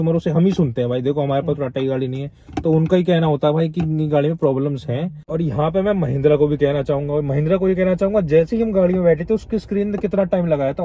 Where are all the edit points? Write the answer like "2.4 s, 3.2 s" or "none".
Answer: 5.2 s